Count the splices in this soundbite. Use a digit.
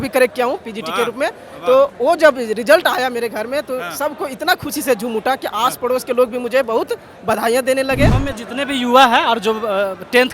1